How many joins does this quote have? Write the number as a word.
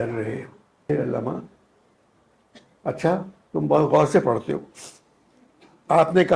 one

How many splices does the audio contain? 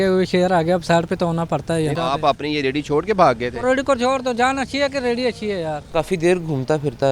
two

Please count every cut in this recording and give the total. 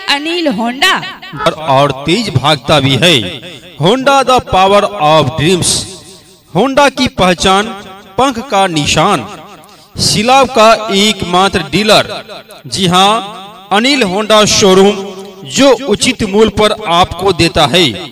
one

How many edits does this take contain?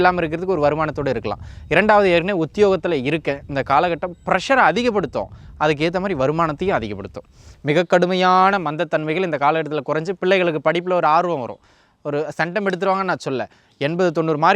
one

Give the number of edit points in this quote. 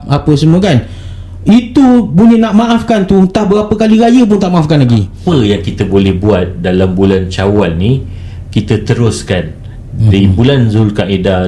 one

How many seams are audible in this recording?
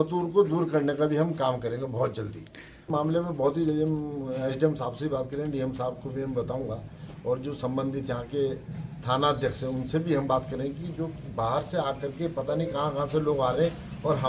one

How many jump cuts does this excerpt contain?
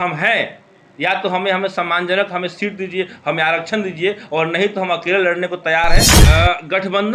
one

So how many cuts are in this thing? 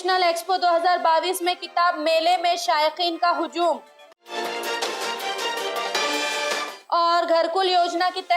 zero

